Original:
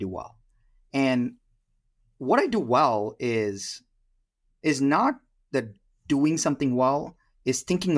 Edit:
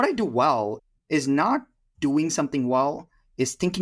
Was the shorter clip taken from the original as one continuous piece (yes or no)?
no